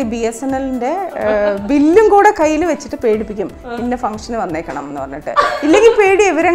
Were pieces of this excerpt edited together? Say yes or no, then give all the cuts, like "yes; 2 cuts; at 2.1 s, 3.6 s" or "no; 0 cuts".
no; 0 cuts